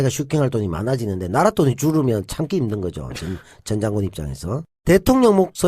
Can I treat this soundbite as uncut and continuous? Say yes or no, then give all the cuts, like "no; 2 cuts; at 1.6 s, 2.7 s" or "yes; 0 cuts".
no; 1 cut; at 3.0 s